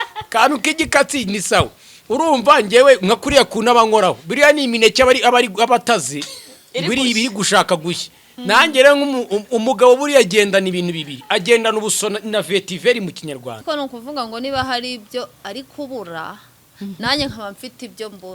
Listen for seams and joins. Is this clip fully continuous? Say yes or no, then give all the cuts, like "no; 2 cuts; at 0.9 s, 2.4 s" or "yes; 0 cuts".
no; 1 cut; at 13.6 s